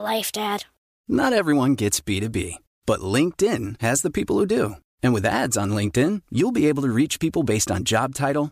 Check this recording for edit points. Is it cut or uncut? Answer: uncut